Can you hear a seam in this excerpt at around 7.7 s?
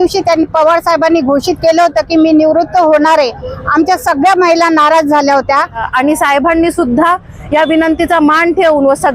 no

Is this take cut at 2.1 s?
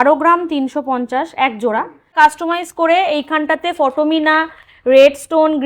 yes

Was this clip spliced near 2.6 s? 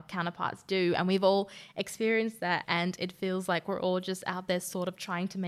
yes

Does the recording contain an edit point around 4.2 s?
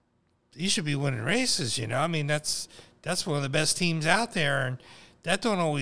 no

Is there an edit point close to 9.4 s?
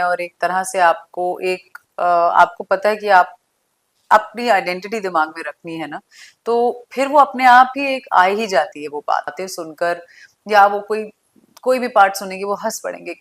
yes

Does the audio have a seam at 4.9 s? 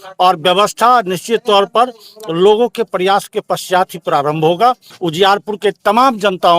yes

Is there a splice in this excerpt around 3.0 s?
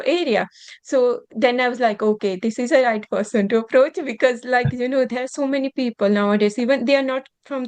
no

